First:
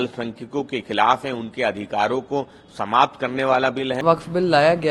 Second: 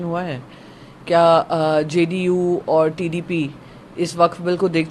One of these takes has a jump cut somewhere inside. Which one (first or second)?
first